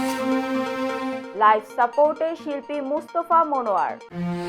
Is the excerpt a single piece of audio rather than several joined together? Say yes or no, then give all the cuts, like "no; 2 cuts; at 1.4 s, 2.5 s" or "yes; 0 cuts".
yes; 0 cuts